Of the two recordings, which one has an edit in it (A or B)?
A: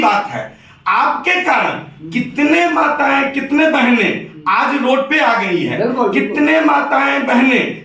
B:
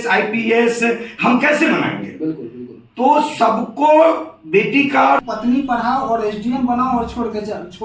B